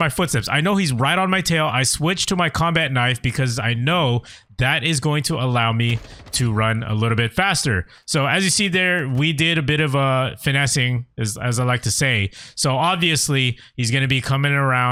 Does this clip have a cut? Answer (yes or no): no